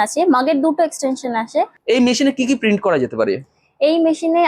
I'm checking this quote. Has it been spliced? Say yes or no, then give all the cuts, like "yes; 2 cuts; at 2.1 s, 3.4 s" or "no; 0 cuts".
yes; 1 cut; at 1.7 s